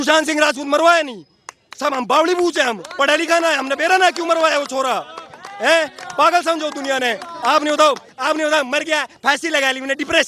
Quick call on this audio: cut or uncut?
uncut